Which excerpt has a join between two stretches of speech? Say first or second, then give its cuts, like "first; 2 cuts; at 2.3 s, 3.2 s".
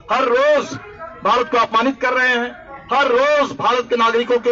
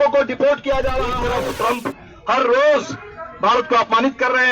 second; 1 cut; at 1.2 s